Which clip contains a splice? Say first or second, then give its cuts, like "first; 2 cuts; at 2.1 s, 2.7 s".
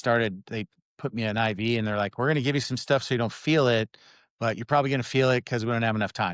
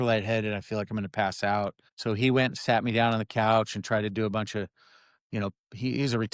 second; 1 cut; at 1.9 s